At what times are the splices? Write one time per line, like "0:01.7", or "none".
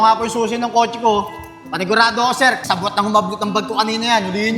0:02.6